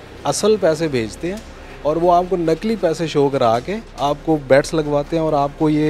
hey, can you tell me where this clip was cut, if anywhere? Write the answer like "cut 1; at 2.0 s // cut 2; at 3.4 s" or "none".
none